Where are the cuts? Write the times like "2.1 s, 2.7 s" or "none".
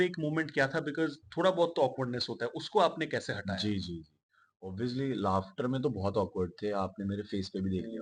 none